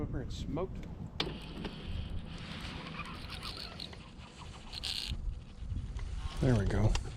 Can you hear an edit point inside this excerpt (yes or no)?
yes